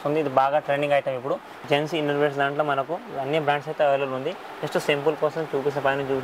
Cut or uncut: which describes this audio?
cut